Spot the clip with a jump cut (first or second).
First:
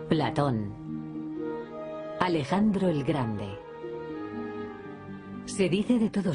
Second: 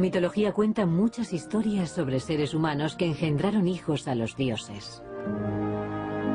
second